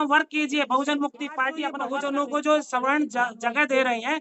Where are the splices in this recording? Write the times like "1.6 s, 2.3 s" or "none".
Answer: 1.8 s